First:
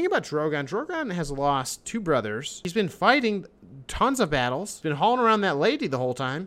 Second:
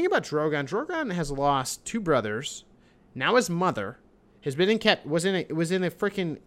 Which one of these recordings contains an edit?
first; 2 cuts; at 2.6 s, 4.8 s

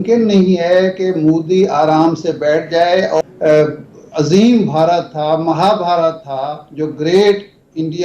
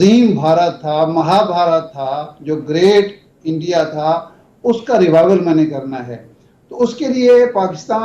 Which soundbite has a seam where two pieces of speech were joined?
first; 1 cut; at 3.2 s

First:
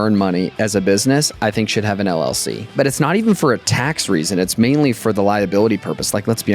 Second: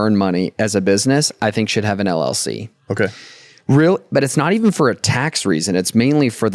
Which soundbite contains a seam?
first; 1 cut; at 2.7 s

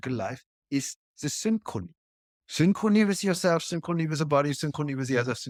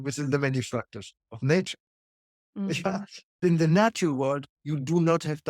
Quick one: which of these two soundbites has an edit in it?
second; 1 cut; at 3.4 s

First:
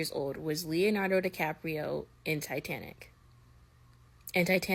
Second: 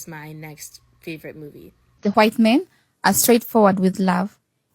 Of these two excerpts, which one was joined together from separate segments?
second; 1 cut; at 2.0 s

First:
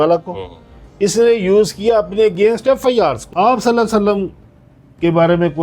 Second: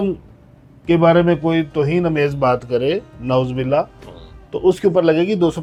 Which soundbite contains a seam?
first; 1 cut; at 3.2 s

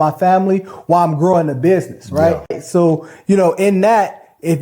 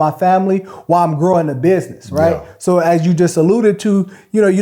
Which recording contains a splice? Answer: first; 1 cut; at 2.6 s

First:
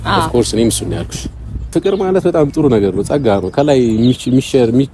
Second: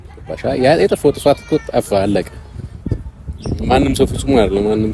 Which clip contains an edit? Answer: first; 1 cut; at 1.7 s

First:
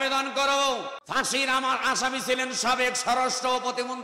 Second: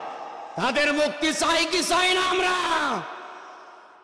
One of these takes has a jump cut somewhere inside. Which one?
first; 1 cut; at 1.0 s

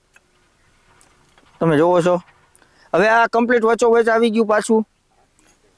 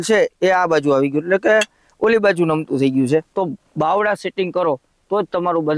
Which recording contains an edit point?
second; 1 cut; at 3.3 s

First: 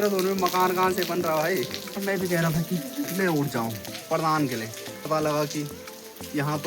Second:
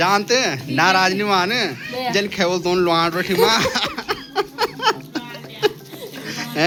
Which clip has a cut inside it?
first; 3 cuts; at 2.0 s, 3.9 s, 5.0 s

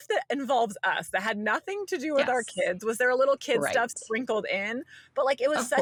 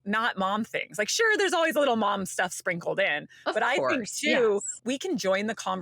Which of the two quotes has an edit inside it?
second; 1 cut; at 4.7 s

